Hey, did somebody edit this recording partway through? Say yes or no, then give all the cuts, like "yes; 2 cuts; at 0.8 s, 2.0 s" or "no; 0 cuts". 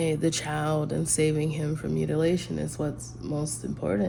no; 0 cuts